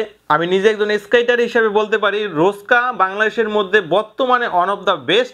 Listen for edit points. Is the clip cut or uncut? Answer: uncut